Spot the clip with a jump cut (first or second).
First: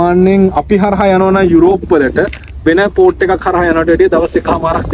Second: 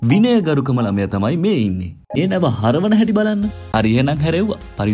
second